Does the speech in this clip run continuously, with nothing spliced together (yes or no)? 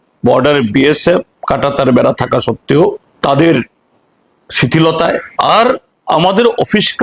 no